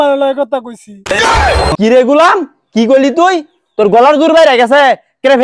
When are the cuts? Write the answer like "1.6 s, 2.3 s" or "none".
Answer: 1.8 s